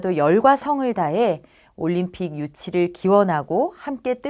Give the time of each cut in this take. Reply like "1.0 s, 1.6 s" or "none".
1.1 s